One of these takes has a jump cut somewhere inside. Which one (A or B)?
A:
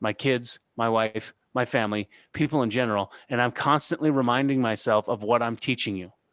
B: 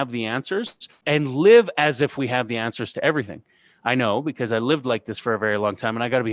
B